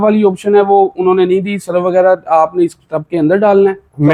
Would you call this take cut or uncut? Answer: uncut